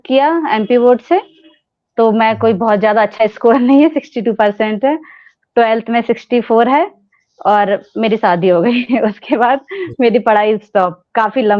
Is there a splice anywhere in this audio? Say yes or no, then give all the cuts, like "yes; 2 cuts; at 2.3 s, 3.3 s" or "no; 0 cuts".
no; 0 cuts